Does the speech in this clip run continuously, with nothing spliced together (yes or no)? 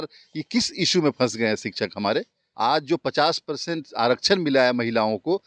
no